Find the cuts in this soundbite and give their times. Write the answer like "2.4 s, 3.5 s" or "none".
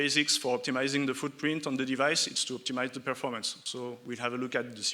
none